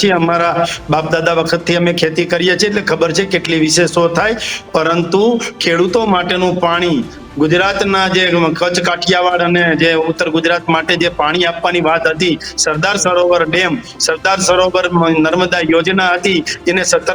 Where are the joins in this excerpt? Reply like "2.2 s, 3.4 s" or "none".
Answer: none